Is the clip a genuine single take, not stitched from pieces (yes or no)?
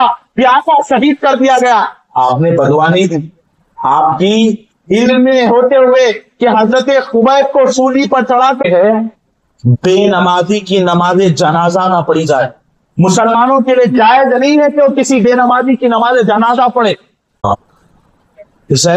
no